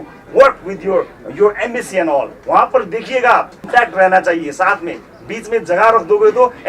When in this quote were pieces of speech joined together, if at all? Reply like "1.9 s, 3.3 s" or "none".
3.6 s